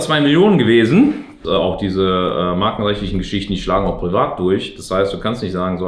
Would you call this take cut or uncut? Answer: cut